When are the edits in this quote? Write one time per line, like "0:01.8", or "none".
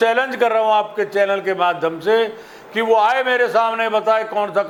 none